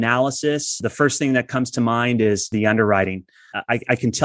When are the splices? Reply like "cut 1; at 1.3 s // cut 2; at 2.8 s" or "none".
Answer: cut 1; at 0.8 s // cut 2; at 2.5 s // cut 3; at 3.5 s